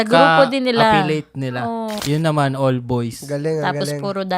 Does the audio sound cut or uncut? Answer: cut